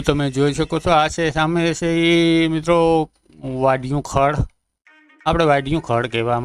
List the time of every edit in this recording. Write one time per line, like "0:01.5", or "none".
none